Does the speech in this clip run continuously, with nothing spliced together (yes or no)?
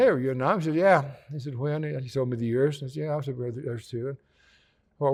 yes